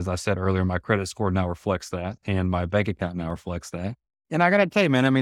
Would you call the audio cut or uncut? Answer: cut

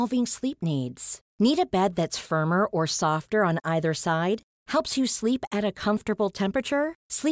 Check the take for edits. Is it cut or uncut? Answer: uncut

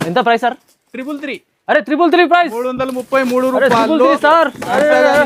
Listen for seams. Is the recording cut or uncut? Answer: uncut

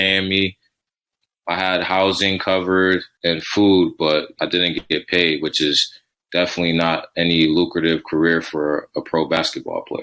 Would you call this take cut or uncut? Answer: cut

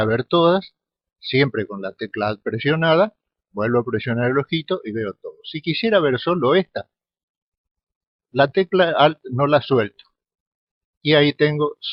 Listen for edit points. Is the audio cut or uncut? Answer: uncut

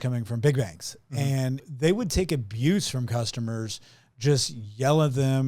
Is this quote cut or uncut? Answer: cut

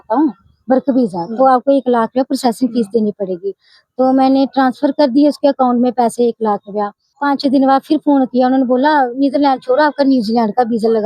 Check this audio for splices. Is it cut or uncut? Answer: cut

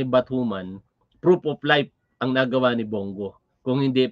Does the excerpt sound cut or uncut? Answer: uncut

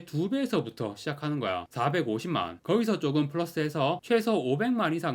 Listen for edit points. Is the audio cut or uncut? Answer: uncut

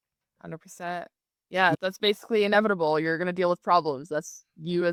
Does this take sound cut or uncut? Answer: uncut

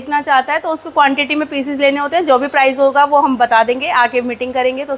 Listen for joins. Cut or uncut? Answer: uncut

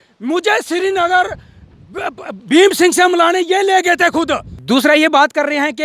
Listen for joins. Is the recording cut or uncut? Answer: cut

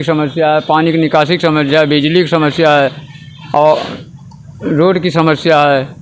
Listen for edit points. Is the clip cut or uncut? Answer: uncut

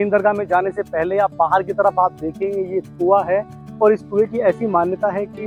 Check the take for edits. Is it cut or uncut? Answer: uncut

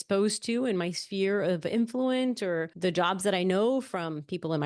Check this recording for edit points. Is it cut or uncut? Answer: cut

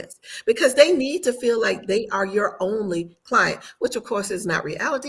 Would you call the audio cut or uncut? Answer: uncut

